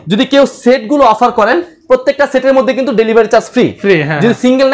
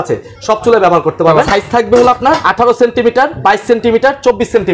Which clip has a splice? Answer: second; 3 cuts; at 1.5 s, 2.5 s, 3.4 s

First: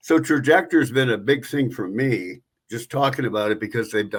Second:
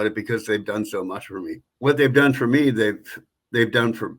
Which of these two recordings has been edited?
second; 1 cut; at 1.7 s

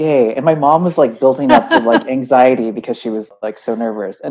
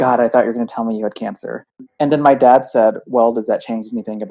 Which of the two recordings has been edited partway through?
second; 1 cut; at 1.9 s

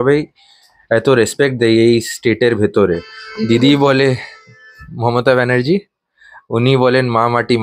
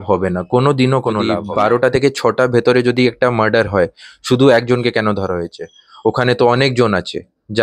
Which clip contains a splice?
second; 1 cut; at 1.3 s

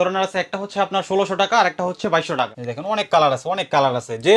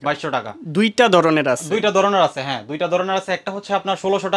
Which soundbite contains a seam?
first; 1 cut; at 2.6 s

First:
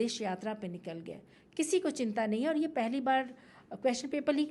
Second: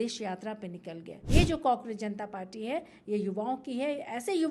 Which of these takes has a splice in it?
second; 1 cut; at 1.2 s

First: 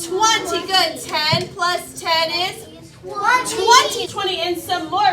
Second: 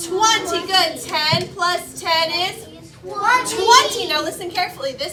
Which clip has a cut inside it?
first; 1 cut; at 4.1 s

